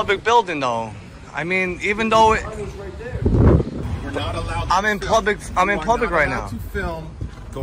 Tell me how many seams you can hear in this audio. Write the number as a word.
one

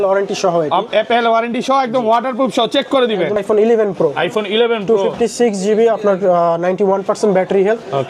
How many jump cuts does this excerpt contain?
one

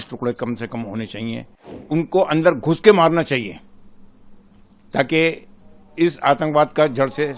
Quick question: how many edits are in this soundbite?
one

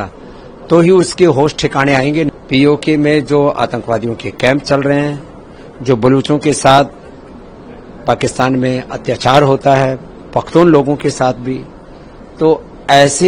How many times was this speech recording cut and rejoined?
one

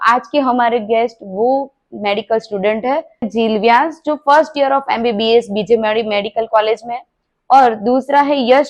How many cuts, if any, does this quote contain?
one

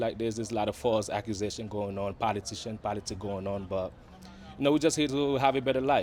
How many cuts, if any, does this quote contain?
zero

